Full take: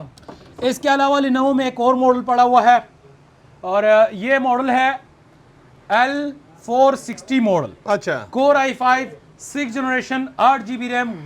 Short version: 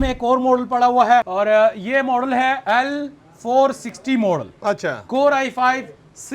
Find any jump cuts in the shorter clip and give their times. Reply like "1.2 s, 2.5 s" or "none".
1.3 s, 2.6 s